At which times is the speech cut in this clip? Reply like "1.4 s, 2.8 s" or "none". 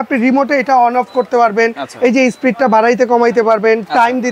none